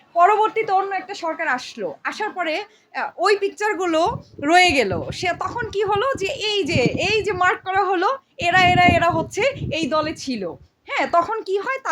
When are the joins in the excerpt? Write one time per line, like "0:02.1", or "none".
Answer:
none